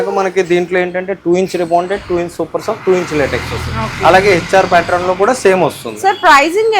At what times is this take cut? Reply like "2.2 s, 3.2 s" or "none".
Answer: none